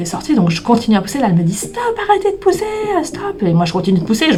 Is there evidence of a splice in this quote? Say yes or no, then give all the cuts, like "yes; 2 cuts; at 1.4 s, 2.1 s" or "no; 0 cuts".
no; 0 cuts